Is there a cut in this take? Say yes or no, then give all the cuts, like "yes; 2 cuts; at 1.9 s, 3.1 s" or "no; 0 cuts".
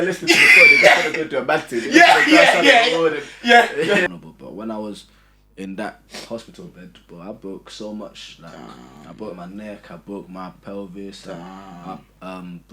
yes; 1 cut; at 4.0 s